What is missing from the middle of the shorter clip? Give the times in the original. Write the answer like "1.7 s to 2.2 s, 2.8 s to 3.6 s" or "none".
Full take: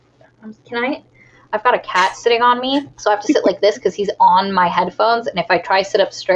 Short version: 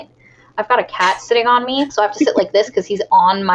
2.9 s to 3.0 s